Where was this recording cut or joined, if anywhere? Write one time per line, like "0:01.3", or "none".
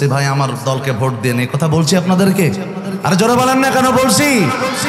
none